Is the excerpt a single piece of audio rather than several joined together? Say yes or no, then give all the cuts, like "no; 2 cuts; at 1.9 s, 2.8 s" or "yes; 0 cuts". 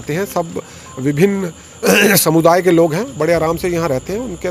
yes; 0 cuts